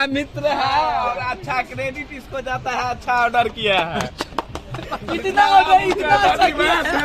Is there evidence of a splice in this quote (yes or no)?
no